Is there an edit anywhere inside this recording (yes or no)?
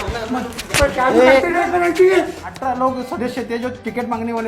yes